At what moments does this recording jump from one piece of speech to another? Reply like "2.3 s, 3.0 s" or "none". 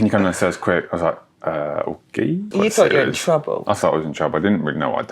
2.5 s